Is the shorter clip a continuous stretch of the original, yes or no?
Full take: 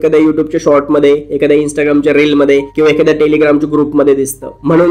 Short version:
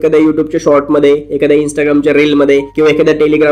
yes